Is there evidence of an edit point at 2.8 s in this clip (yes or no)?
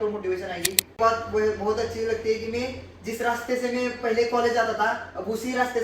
no